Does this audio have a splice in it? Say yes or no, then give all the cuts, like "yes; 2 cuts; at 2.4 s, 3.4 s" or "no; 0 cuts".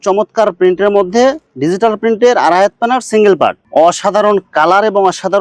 yes; 1 cut; at 3.6 s